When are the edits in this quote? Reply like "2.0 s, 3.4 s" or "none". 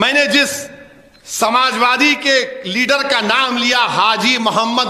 none